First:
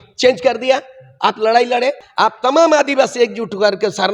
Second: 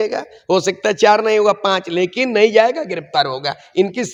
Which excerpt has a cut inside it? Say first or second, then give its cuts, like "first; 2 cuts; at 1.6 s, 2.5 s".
first; 1 cut; at 2.0 s